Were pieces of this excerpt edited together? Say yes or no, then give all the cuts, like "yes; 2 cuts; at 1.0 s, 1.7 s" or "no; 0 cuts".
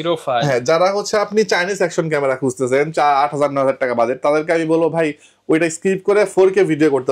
no; 0 cuts